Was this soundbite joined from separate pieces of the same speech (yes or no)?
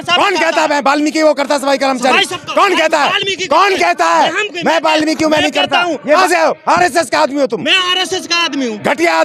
yes